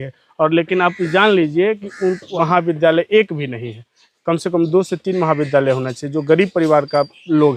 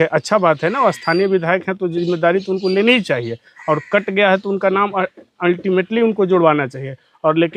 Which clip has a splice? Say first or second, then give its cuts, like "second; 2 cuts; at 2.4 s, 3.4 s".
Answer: first; 1 cut; at 2.3 s